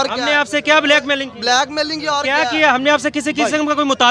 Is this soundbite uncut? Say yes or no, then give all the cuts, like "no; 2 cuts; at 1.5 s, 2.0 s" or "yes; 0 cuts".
yes; 0 cuts